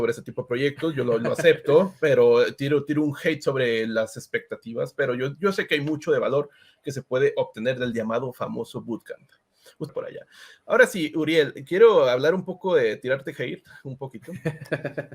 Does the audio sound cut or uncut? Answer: cut